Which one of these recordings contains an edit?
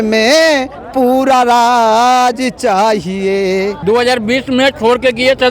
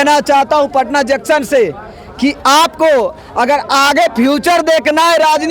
first; 1 cut; at 3.8 s

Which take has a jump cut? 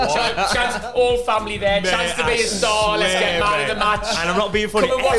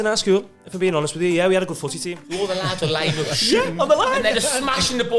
second; 1 cut; at 2.2 s

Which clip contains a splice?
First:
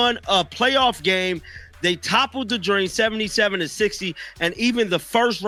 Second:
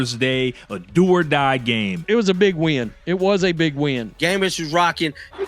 second; 2 cuts; at 2.0 s, 4.1 s

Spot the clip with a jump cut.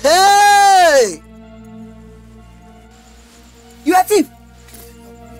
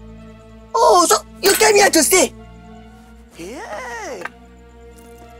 first; 1 cut; at 4.3 s

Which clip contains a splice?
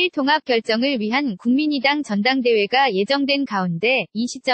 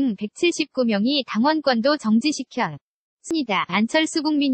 second; 1 cut; at 3.3 s

